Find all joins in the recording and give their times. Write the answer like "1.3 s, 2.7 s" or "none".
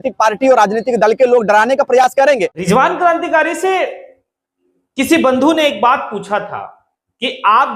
2.6 s